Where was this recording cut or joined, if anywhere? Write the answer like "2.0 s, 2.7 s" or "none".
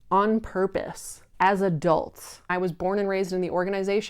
2.5 s